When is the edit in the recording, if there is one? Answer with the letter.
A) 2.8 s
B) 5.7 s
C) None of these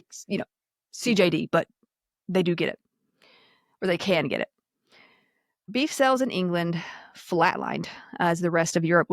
B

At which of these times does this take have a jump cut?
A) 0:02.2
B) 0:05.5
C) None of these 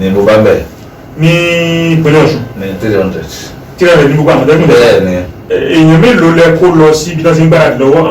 B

